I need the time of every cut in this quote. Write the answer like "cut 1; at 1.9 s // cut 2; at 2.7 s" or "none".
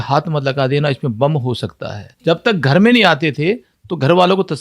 cut 1; at 2.1 s